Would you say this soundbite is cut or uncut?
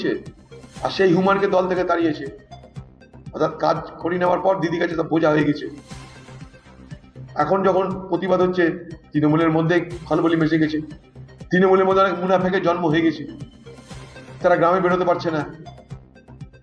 cut